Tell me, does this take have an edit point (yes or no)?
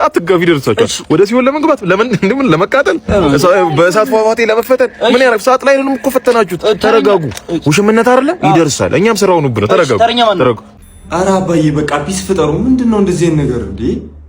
yes